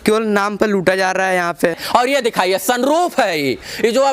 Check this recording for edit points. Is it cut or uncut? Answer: cut